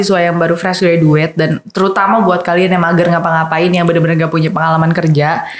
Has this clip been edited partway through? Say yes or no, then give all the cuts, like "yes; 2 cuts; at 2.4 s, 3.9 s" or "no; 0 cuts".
no; 0 cuts